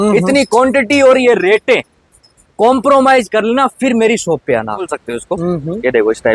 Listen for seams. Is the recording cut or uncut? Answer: cut